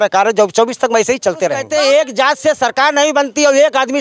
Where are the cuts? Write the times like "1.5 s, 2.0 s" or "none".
1.6 s